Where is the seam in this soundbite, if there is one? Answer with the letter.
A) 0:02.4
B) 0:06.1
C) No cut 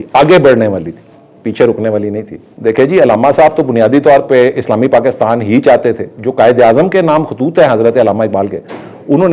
C